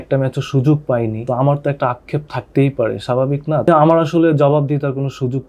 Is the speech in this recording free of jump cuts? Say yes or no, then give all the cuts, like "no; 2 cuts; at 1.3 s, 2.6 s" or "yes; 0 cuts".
no; 2 cuts; at 1.2 s, 3.7 s